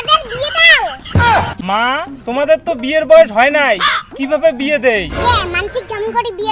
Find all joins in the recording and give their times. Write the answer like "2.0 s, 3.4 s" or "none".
1.6 s